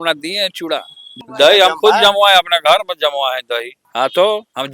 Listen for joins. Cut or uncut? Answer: cut